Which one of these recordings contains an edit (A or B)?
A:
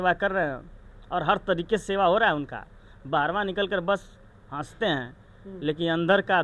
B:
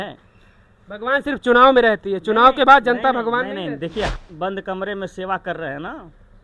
B